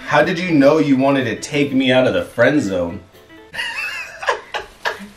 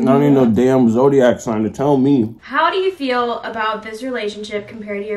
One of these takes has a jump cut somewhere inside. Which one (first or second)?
second